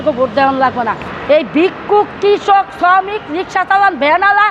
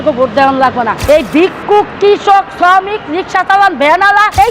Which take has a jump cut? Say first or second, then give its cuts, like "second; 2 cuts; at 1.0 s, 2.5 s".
second; 1 cut; at 1.0 s